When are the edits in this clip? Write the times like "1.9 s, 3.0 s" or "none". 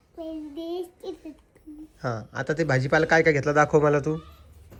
none